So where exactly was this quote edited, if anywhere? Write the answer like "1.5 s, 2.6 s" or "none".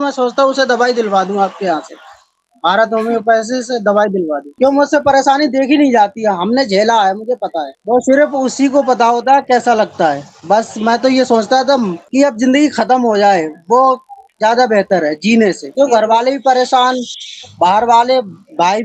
7.7 s

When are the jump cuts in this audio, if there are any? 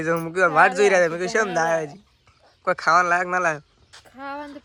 none

